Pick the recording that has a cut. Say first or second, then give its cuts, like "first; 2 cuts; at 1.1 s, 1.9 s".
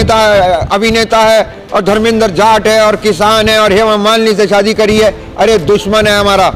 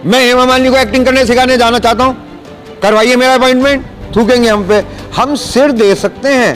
second; 1 cut; at 4.0 s